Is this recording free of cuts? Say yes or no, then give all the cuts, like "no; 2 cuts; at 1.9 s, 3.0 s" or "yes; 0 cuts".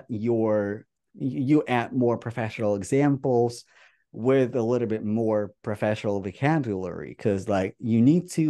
no; 1 cut; at 0.9 s